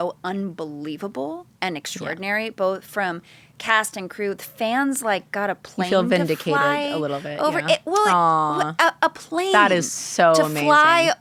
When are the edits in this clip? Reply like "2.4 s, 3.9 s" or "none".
none